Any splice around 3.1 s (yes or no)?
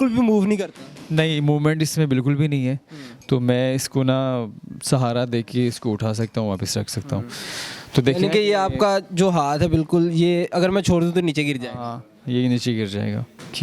no